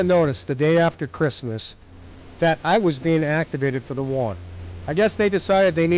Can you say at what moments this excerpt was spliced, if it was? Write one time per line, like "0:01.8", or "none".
none

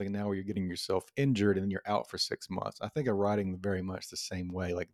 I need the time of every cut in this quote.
none

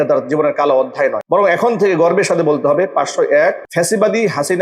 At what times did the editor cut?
0:01.2
0:03.6

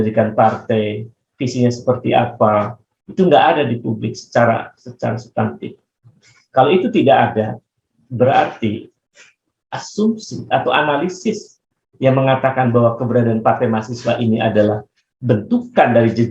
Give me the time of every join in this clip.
none

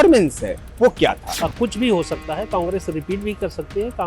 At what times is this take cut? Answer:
0:01.3

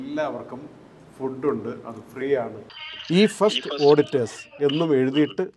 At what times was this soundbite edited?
0:02.6

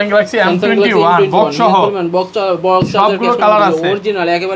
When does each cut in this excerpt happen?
none

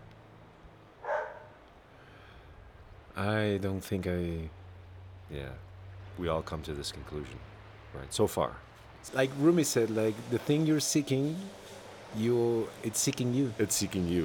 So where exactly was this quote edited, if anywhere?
0:09.0

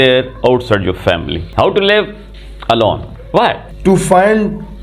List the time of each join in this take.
0:01.4
0:03.7

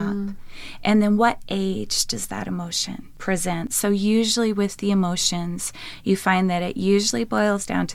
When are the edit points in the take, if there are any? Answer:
none

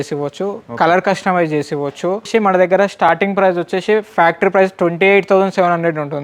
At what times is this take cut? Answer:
0:02.3

